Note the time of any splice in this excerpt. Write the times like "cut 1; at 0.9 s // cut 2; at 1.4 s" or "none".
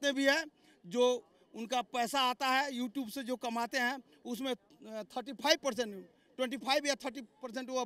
none

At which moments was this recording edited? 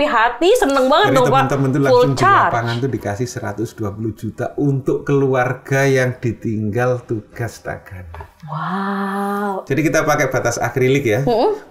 cut 1; at 9.6 s

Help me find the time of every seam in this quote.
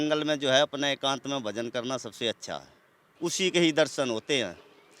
cut 1; at 3.0 s

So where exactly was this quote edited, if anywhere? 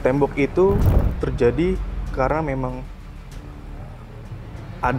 none

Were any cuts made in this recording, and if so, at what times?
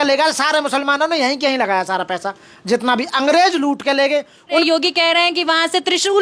cut 1; at 4.6 s

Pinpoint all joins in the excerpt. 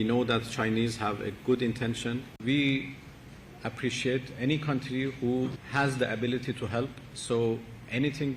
cut 1; at 2.4 s // cut 2; at 5.6 s // cut 3; at 7.1 s

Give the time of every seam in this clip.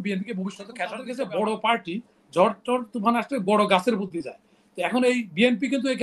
cut 1; at 1.0 s

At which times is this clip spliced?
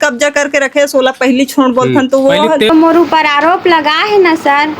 cut 1; at 2.7 s

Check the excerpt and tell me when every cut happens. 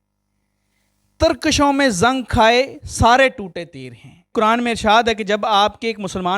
cut 1; at 4.3 s

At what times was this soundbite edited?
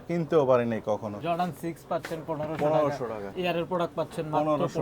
cut 1; at 1.2 s // cut 2; at 3.3 s

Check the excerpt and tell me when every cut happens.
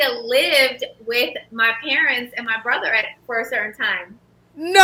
none

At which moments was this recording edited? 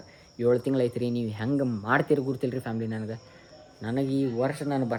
none

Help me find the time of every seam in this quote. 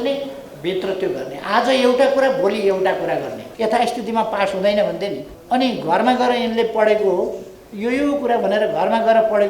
cut 1; at 3.5 s // cut 2; at 5.3 s

